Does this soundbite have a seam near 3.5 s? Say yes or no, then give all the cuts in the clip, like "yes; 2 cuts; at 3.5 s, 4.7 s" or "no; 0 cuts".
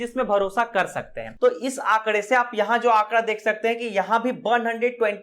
no; 1 cut; at 1.2 s